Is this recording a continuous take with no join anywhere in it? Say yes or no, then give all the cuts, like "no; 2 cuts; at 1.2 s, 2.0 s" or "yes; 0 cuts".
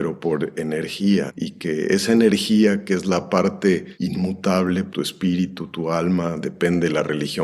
no; 1 cut; at 4.9 s